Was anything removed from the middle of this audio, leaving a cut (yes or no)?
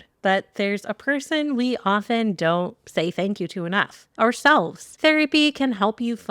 yes